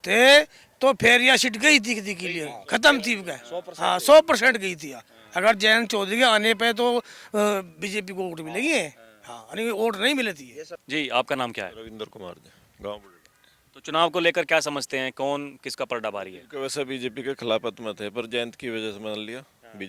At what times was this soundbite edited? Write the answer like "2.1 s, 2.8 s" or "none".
none